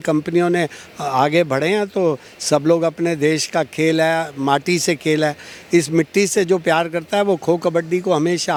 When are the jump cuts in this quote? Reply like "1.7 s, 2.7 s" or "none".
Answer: none